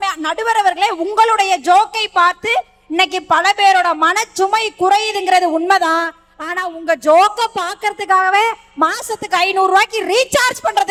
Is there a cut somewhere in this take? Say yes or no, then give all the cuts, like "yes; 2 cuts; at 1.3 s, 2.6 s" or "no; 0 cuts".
no; 0 cuts